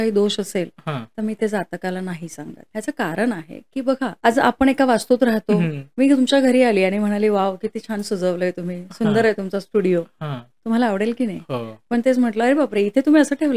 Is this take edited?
yes; 3 cuts; at 2.6 s, 4.2 s, 5.8 s

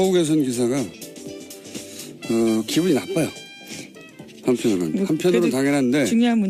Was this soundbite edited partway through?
no; 0 cuts

